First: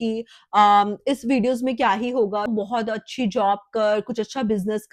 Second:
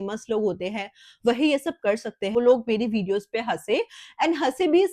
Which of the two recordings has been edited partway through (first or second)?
second